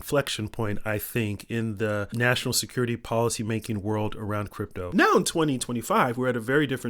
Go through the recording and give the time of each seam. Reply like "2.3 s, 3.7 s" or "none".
4.8 s